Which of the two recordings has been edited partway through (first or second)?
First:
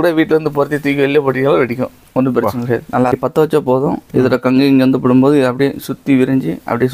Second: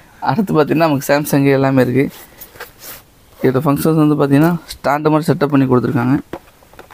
first